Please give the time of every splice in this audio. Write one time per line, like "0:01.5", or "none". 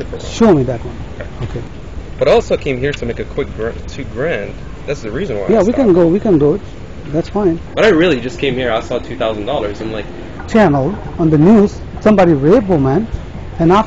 0:01.7
0:07.6
0:10.3